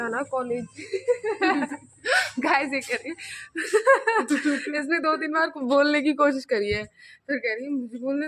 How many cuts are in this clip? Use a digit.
0